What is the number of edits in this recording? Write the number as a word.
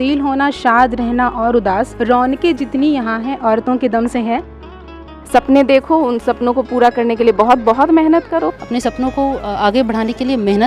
three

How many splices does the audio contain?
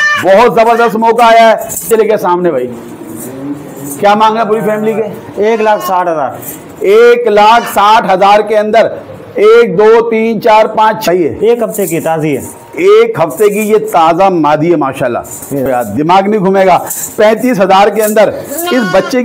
three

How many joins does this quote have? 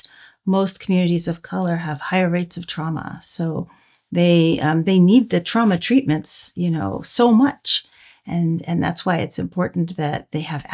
zero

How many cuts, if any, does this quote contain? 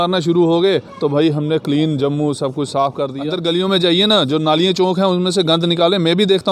one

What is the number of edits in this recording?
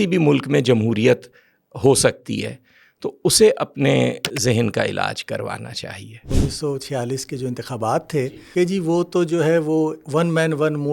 two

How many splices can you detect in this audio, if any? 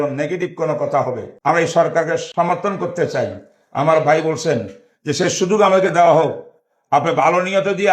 two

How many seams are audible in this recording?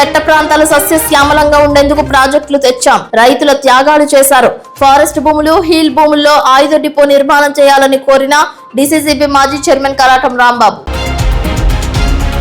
one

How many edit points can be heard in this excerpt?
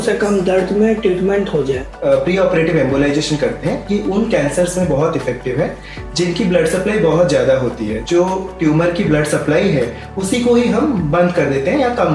two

